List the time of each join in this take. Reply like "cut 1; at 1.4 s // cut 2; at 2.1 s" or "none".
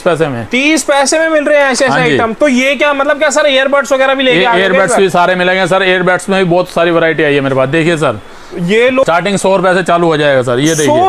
none